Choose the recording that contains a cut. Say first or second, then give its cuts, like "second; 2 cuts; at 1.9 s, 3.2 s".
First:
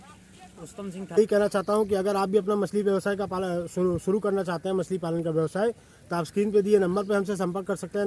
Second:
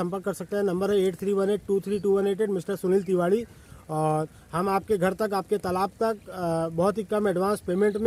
first; 1 cut; at 1.2 s